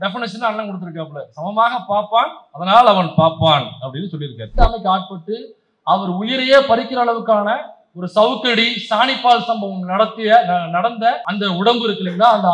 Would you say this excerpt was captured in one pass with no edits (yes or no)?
no